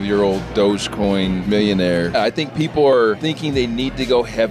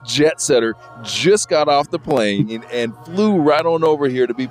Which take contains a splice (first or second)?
first